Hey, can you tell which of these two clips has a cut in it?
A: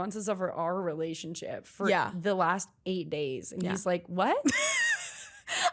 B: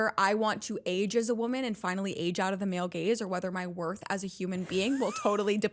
A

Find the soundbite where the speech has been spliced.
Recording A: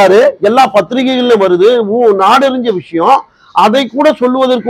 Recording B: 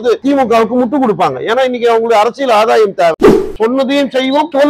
B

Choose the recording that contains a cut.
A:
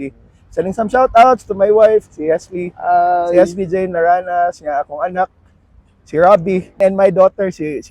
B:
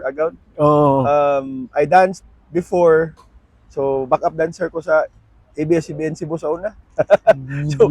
A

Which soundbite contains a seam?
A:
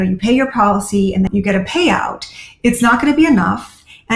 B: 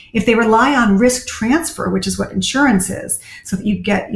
A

